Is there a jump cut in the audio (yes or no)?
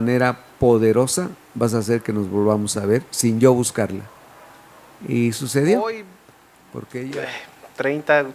yes